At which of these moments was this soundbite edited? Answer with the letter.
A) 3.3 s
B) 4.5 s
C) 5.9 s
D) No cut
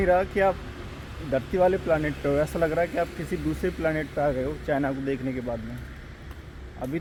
D